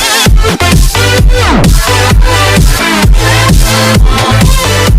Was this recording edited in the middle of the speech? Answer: no; 0 cuts

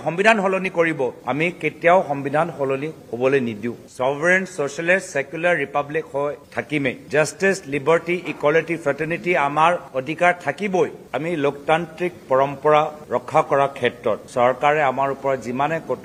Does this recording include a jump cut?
yes; 1 cut; at 11.0 s

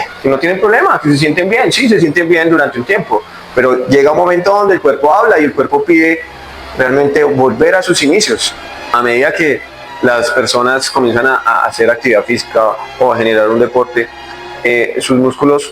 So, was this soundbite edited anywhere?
yes; 1 cut; at 8.9 s

